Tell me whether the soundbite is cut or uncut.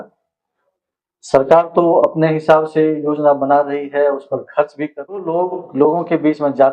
cut